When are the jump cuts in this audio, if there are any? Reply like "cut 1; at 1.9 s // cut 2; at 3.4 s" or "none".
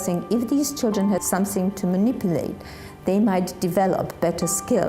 cut 1; at 1.2 s